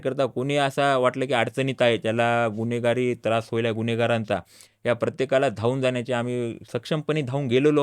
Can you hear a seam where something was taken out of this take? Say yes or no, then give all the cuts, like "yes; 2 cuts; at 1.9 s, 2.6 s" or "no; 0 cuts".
no; 0 cuts